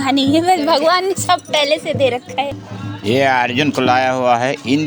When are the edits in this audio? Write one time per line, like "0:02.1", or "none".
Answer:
0:02.6